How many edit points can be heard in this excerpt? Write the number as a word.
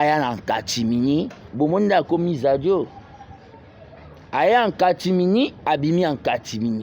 one